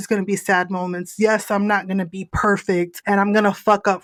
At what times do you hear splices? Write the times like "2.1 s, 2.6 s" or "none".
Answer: none